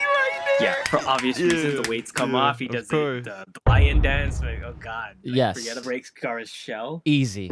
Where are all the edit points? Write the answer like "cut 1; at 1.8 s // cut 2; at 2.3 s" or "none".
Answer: cut 1; at 5.7 s